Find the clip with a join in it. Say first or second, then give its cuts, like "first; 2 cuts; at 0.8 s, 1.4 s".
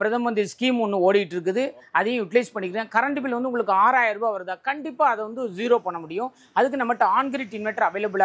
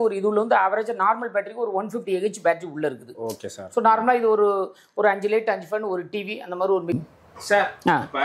second; 1 cut; at 6.9 s